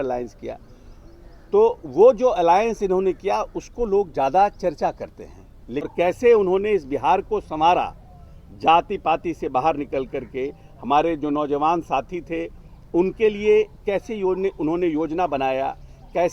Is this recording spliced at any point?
yes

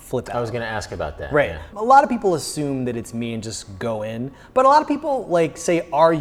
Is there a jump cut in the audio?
yes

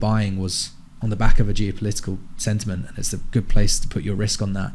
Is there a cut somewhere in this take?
no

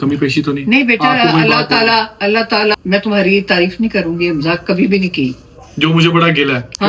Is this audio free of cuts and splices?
no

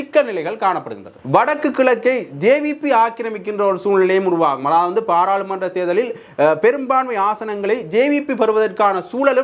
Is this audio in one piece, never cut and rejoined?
no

